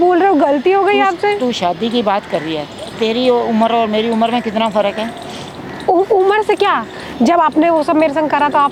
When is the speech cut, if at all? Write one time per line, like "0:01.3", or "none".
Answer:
none

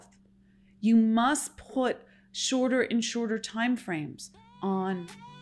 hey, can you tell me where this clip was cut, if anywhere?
none

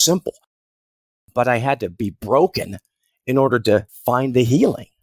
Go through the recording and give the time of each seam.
0:03.9

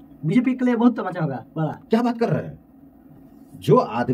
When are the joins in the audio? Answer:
none

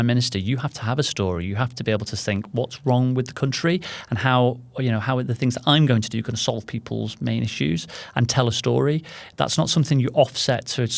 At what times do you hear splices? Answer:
none

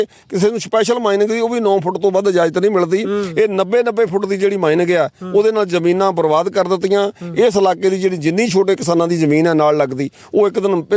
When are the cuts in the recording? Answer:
none

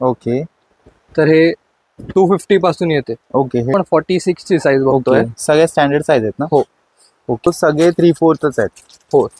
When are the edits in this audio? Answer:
0:03.7
0:07.5

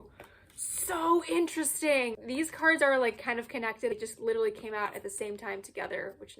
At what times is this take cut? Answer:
0:02.2
0:03.9

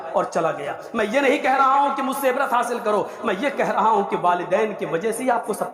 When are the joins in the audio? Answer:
none

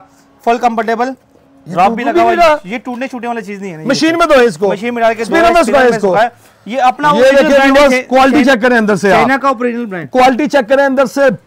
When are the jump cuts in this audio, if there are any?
none

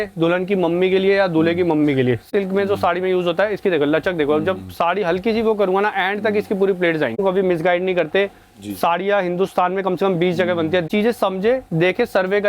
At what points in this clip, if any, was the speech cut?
0:02.3
0:07.2
0:10.8

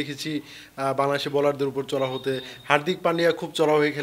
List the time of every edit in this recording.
none

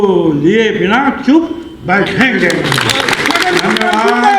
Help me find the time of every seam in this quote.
none

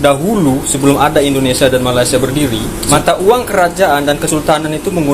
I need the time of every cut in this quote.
0:02.8

